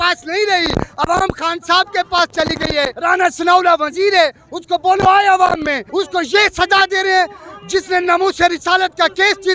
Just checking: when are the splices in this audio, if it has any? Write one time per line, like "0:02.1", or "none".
0:02.9
0:05.8